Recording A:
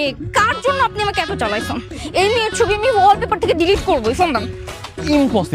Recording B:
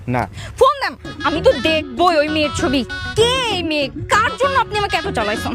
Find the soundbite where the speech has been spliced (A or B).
B